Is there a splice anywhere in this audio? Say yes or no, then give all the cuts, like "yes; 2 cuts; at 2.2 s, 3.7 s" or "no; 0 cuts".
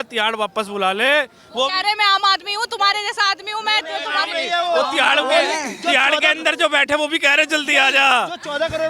no; 0 cuts